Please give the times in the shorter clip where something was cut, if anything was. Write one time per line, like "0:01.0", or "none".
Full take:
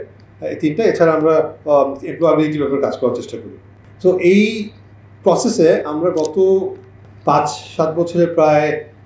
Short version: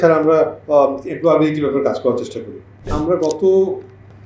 0:02.9